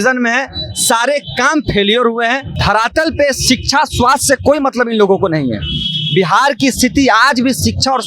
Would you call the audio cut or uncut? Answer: cut